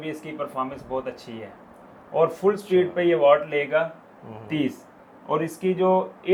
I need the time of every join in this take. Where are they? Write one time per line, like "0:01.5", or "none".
none